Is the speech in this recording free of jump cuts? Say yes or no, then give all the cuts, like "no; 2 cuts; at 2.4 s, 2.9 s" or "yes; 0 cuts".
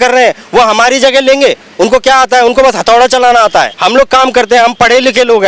no; 1 cut; at 3.7 s